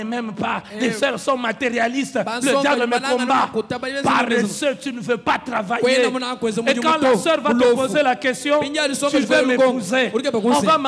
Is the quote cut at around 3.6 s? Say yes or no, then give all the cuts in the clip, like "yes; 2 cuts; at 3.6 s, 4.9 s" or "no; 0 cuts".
no; 0 cuts